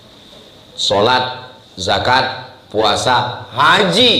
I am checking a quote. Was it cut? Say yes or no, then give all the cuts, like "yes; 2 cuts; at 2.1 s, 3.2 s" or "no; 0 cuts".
no; 0 cuts